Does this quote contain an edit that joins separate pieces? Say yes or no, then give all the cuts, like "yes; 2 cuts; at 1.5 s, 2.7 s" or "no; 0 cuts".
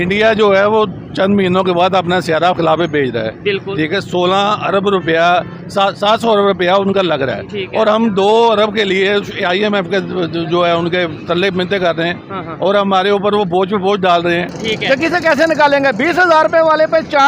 yes; 1 cut; at 14.5 s